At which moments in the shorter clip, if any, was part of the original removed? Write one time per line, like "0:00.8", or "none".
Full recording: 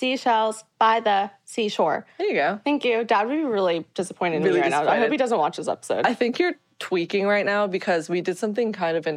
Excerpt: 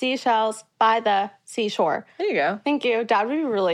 none